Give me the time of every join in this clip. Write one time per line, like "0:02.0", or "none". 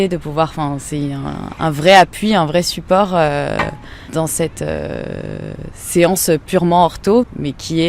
0:04.1
0:07.2